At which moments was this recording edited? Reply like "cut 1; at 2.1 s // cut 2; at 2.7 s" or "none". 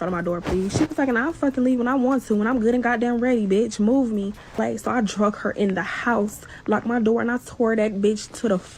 cut 1; at 4.5 s // cut 2; at 6.5 s